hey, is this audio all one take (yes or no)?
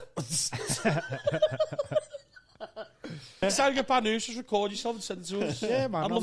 no